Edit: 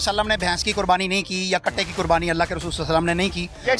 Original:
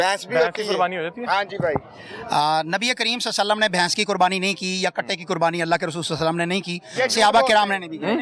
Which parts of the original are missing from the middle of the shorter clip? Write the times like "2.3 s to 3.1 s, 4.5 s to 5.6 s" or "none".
none